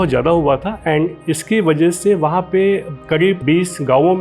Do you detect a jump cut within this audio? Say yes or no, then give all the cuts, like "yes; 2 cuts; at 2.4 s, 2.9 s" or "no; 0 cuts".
no; 0 cuts